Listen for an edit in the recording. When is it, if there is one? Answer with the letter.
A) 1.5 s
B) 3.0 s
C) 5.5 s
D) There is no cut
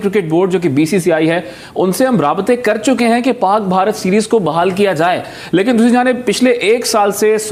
D